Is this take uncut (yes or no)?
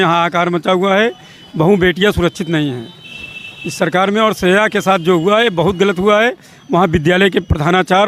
yes